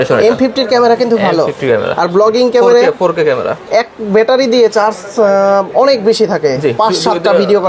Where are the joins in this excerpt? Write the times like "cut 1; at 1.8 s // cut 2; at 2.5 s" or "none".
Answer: none